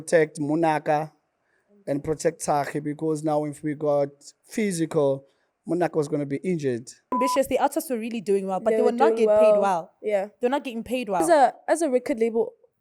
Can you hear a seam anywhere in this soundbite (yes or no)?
yes